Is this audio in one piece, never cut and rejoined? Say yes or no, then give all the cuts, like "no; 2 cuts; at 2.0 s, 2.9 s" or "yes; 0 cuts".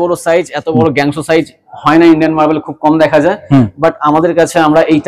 yes; 0 cuts